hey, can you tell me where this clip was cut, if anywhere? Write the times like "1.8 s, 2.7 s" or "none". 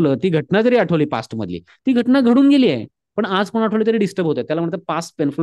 none